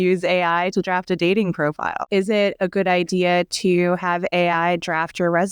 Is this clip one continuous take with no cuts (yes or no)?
no